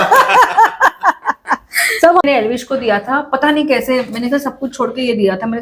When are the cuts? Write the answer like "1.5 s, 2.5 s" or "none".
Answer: 2.2 s